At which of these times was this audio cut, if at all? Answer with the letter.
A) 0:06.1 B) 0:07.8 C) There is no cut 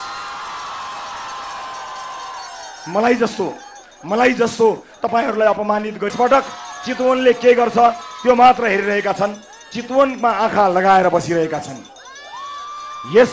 A